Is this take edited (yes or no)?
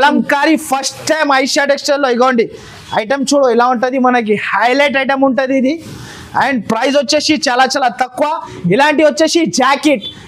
no